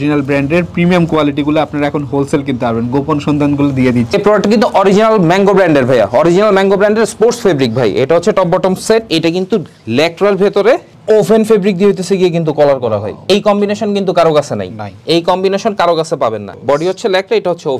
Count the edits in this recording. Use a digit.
2